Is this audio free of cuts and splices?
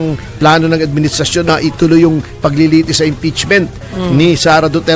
no; 1 cut; at 1.5 s

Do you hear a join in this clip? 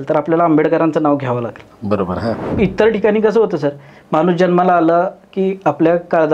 yes; 1 cut; at 2.4 s

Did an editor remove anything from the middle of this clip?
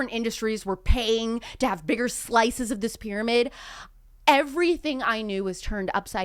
no; 0 cuts

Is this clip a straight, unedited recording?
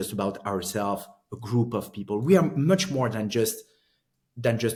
yes; 0 cuts

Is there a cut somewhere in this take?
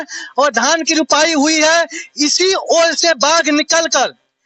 no; 0 cuts

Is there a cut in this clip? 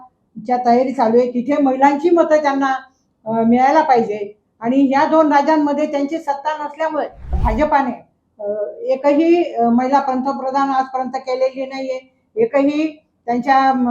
yes; 1 cut; at 7.3 s

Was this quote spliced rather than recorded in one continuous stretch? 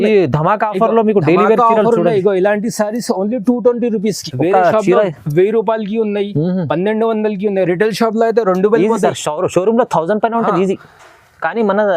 yes; 1 cut; at 4.3 s

